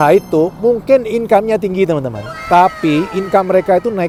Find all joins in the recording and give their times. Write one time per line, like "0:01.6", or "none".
none